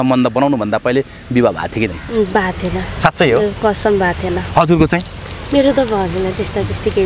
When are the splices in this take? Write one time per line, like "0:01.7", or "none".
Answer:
none